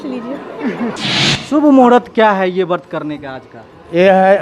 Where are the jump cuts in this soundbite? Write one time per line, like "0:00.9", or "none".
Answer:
0:01.0